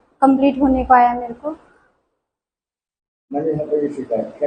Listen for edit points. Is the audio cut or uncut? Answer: uncut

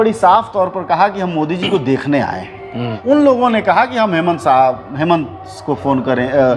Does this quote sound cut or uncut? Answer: cut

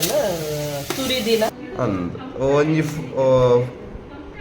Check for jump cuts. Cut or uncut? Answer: cut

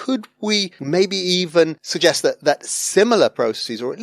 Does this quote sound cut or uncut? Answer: cut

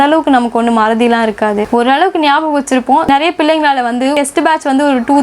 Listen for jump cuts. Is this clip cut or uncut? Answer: cut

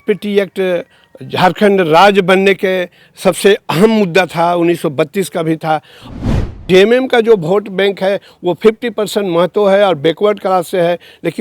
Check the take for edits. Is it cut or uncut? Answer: cut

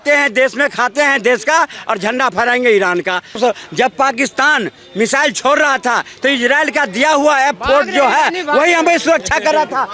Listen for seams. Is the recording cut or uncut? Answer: cut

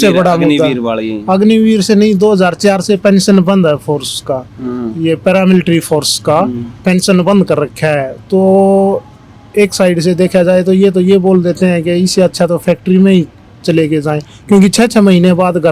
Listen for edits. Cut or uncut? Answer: uncut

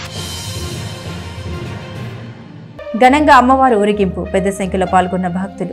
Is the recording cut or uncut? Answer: cut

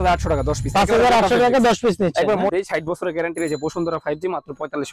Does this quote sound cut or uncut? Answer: cut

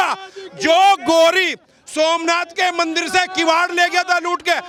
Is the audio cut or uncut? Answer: uncut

